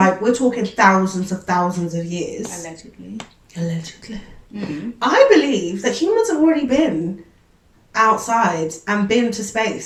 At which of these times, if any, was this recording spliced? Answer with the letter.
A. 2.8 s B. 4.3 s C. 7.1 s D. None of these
D